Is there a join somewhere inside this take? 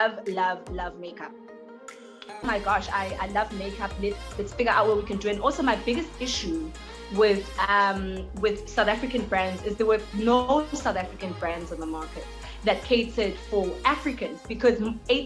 yes; 1 cut; at 2.4 s

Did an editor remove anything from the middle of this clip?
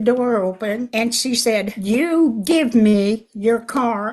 yes; 2 cuts; at 0.9 s, 1.9 s

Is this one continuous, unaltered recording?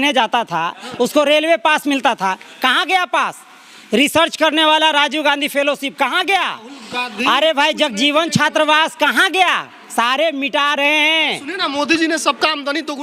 yes; 0 cuts

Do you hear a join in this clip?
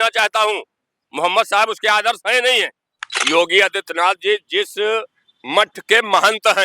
yes; 1 cut; at 3.2 s

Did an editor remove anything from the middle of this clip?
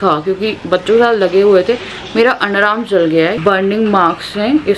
yes; 1 cut; at 3.4 s

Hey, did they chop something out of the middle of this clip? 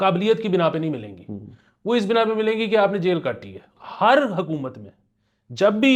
yes; 1 cut; at 3.7 s

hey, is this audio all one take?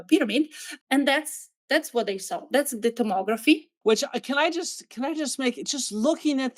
no; 1 cut; at 3.7 s

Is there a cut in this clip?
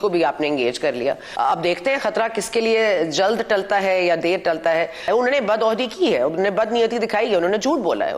yes; 2 cuts; at 1.3 s, 5.1 s

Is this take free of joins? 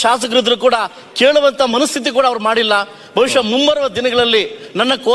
yes; 0 cuts

